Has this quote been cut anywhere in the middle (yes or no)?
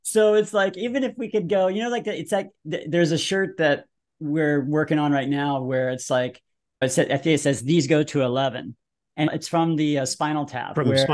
yes